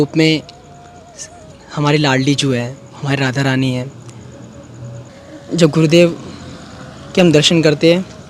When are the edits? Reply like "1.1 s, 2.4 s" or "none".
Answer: 5.1 s